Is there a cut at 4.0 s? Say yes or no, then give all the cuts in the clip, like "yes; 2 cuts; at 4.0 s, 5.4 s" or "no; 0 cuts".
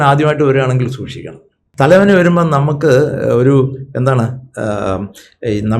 no; 1 cut; at 1.6 s